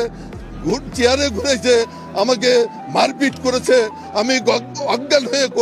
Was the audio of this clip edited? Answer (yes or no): no